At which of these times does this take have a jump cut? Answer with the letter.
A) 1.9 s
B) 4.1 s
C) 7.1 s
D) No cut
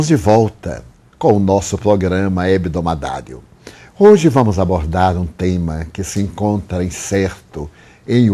D